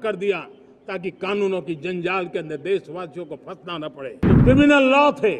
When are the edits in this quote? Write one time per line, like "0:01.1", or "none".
0:04.2